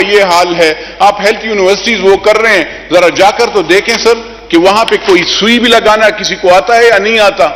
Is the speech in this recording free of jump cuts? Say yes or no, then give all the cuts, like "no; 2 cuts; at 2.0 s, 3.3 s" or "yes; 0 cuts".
yes; 0 cuts